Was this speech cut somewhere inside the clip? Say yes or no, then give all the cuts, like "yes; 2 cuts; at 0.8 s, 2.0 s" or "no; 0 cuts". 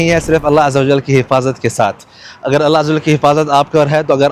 no; 0 cuts